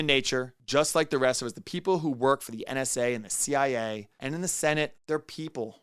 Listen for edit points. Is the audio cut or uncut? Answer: uncut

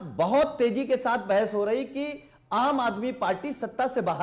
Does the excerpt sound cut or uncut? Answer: uncut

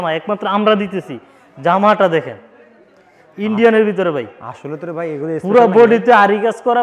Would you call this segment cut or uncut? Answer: uncut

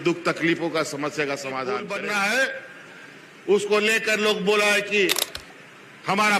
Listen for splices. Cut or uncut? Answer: cut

